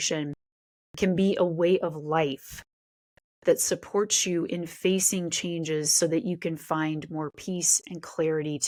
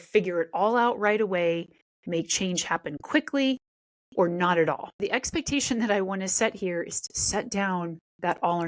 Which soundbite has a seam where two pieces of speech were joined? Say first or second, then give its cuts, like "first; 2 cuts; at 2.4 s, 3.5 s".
second; 1 cut; at 5.0 s